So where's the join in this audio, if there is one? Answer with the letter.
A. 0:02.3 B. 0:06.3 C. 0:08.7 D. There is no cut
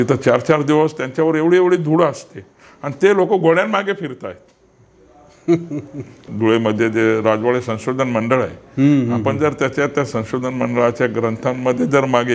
B